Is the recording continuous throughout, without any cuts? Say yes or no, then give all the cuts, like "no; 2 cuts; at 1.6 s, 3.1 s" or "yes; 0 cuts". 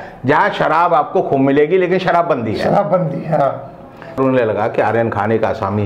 no; 1 cut; at 4.2 s